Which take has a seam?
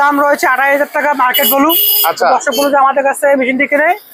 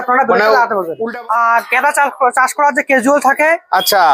second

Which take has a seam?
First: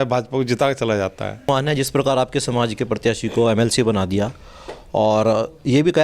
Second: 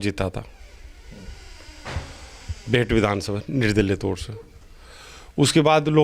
first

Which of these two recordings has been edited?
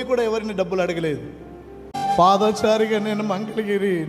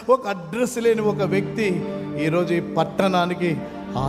first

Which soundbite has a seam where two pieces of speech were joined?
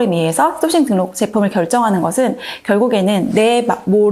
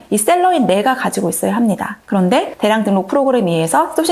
second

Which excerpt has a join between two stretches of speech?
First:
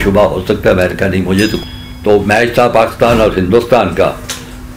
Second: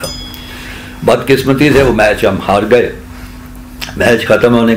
first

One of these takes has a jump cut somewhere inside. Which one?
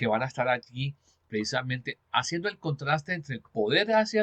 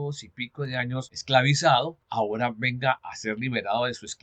second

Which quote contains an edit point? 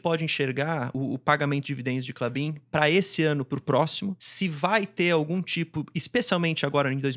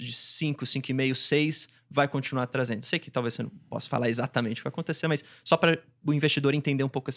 first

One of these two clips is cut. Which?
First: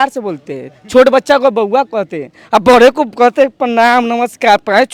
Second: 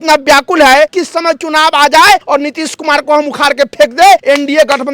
second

